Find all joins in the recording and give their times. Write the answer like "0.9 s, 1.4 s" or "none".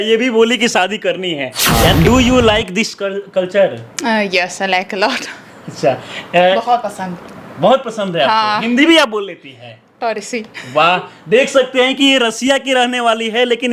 1.9 s